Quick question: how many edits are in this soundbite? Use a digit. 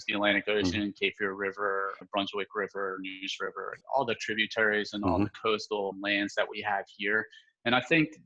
3